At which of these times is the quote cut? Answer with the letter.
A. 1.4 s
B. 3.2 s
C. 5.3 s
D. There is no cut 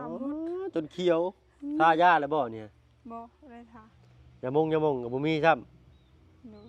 D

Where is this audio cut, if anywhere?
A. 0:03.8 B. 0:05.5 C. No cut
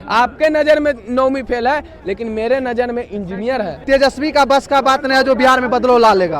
A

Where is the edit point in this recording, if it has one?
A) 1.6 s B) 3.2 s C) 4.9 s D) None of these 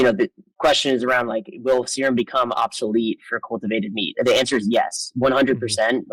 D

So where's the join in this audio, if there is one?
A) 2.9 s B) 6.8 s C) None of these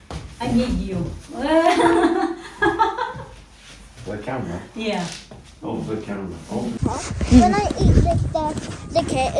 B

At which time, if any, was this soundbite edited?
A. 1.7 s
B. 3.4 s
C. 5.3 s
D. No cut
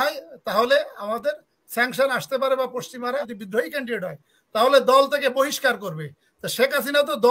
B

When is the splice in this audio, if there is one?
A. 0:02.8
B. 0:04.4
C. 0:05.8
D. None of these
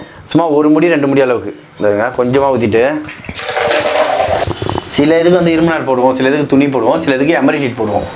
B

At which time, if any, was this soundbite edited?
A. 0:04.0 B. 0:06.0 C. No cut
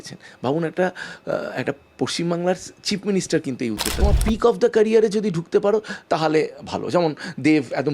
A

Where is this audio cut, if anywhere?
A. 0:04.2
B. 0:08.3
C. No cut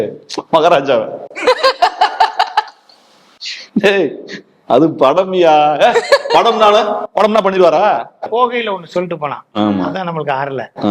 B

